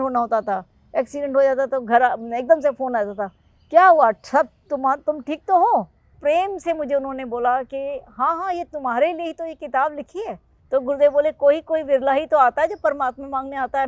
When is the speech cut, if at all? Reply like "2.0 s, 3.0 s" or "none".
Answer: 6.2 s, 10.5 s